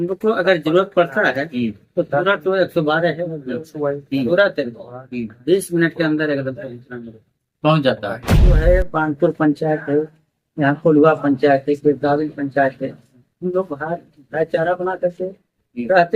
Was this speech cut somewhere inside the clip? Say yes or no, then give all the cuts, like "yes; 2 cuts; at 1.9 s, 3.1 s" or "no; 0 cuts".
yes; 1 cut; at 8.6 s